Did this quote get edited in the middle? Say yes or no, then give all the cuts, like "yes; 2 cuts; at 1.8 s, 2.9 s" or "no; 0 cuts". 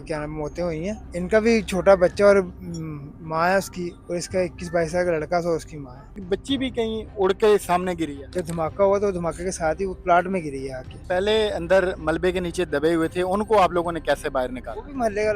yes; 4 cuts; at 1.0 s, 6.2 s, 8.2 s, 11.0 s